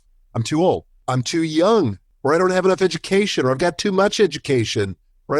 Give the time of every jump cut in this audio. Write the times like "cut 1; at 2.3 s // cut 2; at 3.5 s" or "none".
cut 1; at 1.0 s // cut 2; at 2.1 s